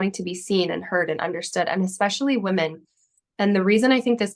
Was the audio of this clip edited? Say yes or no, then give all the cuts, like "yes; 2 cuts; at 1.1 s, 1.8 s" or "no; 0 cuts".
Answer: no; 0 cuts